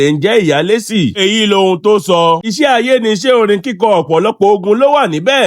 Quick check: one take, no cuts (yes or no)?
no